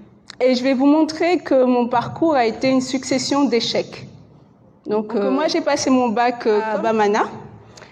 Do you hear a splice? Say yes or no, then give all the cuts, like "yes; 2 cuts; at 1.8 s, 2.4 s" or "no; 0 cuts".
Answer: yes; 2 cuts; at 5.3 s, 6.7 s